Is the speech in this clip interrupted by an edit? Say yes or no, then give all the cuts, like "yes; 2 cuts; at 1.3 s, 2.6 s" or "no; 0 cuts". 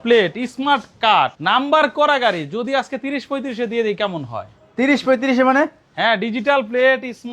no; 0 cuts